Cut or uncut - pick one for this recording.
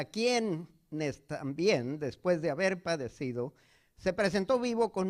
uncut